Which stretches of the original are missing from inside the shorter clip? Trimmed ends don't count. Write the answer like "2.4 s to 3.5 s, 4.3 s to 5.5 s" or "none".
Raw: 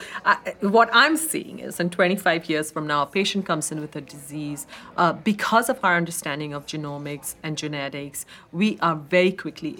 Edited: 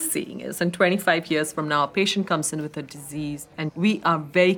4.7 s to 8.3 s